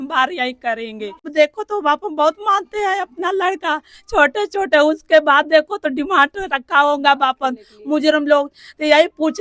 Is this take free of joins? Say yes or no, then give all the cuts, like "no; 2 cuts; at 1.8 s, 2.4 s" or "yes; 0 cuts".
no; 1 cut; at 1.2 s